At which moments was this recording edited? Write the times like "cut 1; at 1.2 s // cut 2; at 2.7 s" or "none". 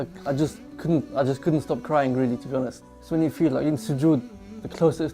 cut 1; at 2.9 s